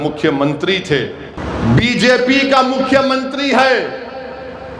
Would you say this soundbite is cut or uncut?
cut